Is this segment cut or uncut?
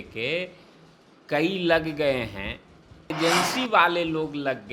cut